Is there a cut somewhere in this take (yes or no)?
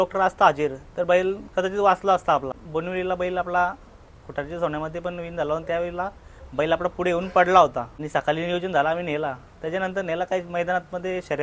yes